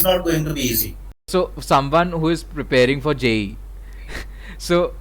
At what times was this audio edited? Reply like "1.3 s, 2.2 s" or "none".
1.3 s